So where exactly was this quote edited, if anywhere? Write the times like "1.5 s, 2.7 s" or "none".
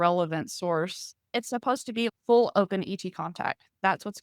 1.6 s